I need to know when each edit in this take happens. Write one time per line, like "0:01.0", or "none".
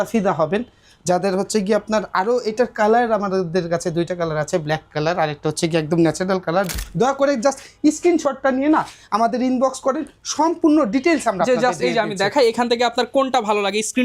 0:06.7